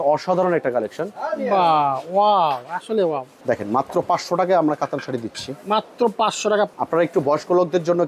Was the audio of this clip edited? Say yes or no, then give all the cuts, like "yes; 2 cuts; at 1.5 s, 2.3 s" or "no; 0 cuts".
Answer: yes; 2 cuts; at 3.3 s, 6.7 s